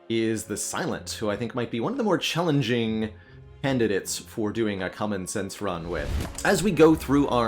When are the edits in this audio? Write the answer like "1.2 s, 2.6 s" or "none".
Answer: 6.2 s